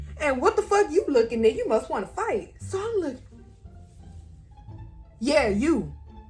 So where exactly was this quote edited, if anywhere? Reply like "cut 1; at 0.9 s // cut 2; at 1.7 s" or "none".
none